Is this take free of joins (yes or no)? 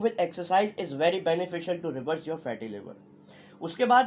yes